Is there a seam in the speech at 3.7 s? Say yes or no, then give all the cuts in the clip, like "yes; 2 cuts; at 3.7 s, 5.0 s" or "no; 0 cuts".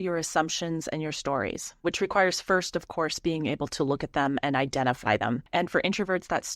no; 2 cuts; at 1.8 s, 5.4 s